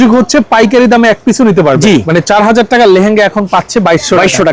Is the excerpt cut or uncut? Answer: cut